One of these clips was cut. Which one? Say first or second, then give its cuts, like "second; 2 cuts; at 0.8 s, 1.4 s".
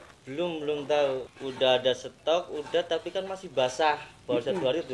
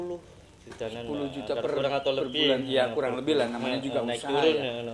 first; 1 cut; at 1.4 s